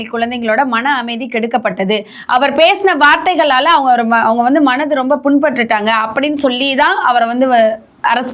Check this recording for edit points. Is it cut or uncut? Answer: uncut